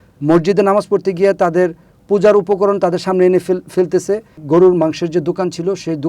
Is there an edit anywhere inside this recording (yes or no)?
yes